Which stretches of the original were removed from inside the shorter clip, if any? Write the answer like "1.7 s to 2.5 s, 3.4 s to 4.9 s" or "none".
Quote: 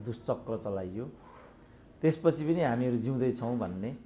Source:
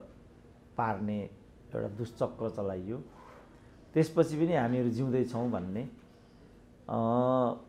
none

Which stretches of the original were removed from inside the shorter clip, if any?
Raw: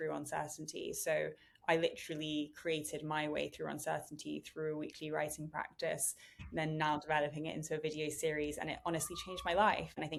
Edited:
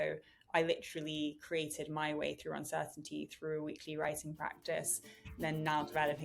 none

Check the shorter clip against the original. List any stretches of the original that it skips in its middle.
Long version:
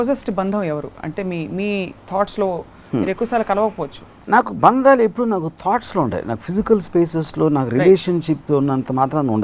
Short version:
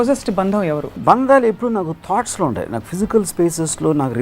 1.0 s to 4.5 s

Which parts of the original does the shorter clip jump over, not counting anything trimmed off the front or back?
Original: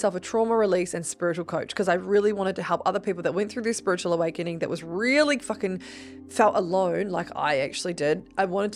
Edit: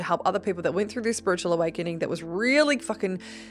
none

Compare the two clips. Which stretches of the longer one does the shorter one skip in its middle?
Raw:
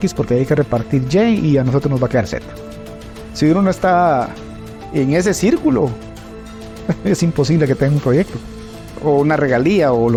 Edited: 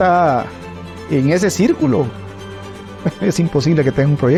none

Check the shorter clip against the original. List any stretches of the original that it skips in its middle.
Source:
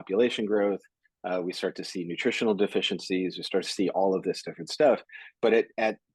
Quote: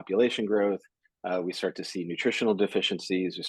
none

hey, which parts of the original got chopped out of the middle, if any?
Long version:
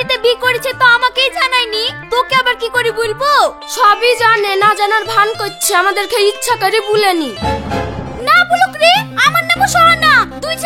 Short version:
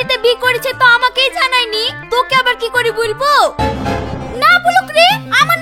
3.6 s to 7.4 s

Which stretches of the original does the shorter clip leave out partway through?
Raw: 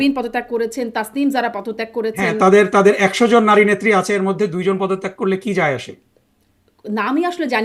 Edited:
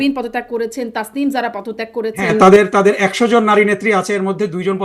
none

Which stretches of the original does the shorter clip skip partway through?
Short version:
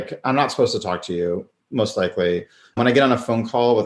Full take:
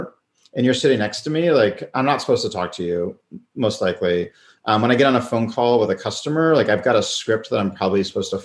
3.3 s to 3.4 s, 4.6 s to 4.8 s

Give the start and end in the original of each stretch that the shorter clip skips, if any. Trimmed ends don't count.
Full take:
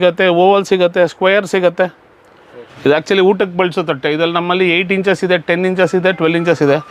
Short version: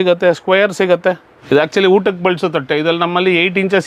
2.0 s to 2.7 s

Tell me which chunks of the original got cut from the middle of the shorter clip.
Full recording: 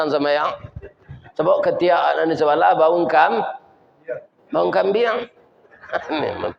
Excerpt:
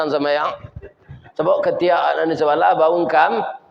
none

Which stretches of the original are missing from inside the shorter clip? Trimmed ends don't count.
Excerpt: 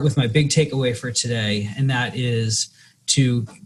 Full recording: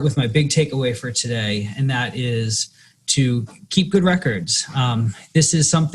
none

